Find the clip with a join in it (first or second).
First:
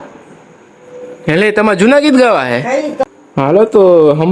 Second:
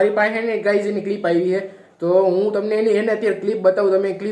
first